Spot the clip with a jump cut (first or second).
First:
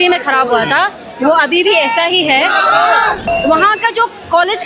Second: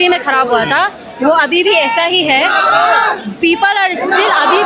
first